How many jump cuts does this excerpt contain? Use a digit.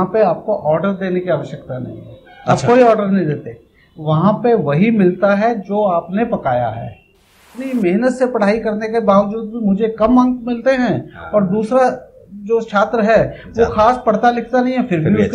1